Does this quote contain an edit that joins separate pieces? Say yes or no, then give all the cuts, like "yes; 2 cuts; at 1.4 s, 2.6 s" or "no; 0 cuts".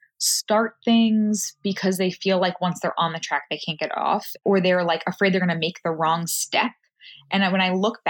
yes; 1 cut; at 4.3 s